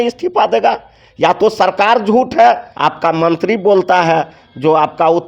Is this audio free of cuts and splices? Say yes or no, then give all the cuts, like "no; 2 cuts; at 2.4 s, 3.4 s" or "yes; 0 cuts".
no; 1 cut; at 2.7 s